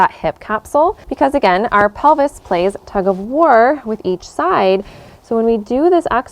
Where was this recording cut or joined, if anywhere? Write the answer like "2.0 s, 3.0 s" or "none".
1.0 s